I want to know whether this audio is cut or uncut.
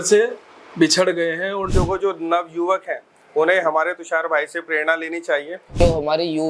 cut